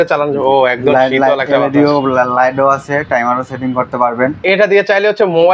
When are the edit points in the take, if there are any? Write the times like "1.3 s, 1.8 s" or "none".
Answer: 4.4 s